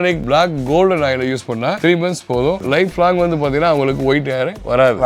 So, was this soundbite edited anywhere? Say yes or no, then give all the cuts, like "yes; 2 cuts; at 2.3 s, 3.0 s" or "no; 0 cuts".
no; 0 cuts